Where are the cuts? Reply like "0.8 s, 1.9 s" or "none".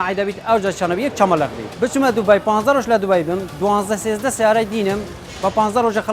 1.6 s